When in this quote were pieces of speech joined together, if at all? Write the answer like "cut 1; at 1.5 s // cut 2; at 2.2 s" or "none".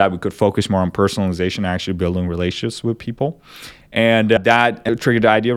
cut 1; at 4.4 s